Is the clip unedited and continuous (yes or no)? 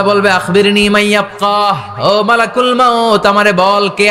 yes